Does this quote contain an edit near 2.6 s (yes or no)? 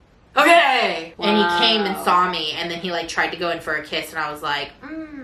no